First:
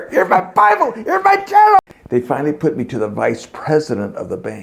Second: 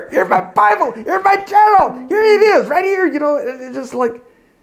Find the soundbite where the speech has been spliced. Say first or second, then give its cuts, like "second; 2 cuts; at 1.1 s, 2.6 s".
first; 1 cut; at 1.8 s